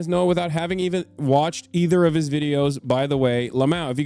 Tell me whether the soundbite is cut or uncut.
uncut